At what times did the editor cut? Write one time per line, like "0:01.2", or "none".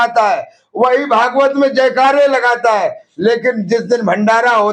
none